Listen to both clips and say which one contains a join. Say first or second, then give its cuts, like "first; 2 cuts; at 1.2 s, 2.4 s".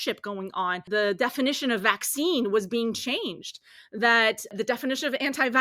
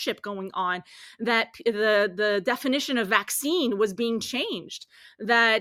first; 2 cuts; at 0.9 s, 4.5 s